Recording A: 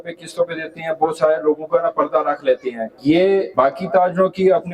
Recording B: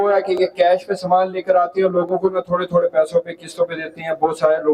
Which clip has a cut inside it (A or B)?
A